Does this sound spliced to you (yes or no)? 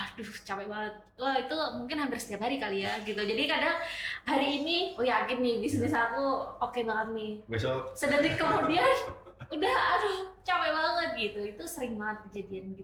no